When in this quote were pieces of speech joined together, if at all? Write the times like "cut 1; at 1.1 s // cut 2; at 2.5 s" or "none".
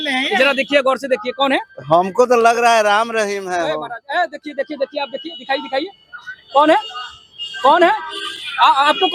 none